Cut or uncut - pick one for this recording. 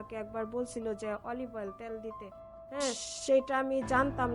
cut